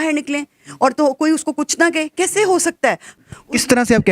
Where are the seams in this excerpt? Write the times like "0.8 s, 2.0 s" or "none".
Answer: 3.1 s

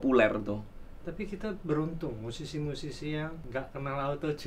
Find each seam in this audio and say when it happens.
3.4 s

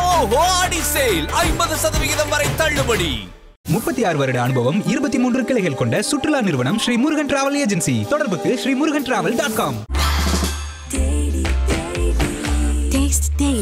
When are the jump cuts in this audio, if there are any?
none

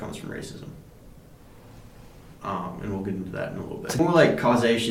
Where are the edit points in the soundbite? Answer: 4.0 s

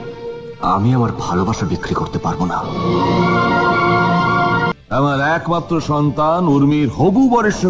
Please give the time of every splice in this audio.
4.7 s

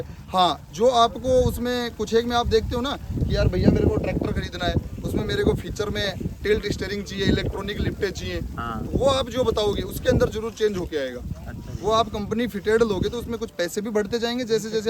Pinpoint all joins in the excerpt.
none

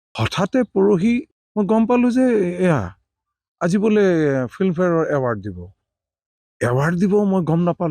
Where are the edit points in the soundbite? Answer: 1.4 s

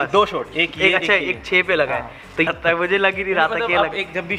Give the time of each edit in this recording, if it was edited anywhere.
2.5 s

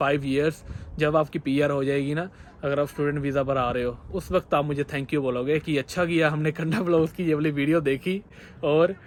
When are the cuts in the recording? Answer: none

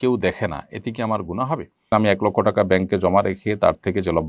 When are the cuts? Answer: 1.8 s

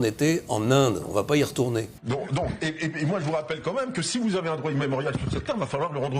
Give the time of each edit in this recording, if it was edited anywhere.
2.0 s

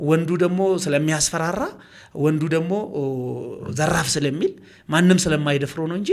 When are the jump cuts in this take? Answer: none

